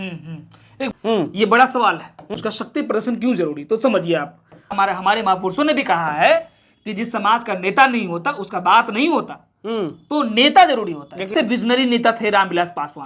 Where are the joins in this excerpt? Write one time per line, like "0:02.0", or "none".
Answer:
0:00.9
0:04.7
0:11.3